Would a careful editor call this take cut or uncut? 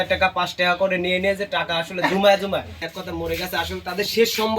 cut